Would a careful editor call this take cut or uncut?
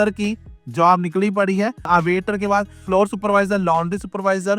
cut